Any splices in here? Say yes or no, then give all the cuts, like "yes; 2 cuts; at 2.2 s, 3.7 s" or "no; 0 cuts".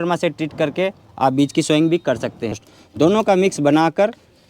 yes; 1 cut; at 2.7 s